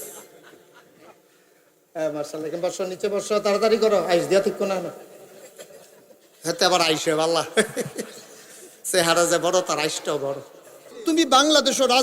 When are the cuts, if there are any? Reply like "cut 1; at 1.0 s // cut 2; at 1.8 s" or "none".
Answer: cut 1; at 10.8 s